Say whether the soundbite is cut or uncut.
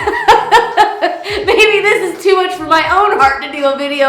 uncut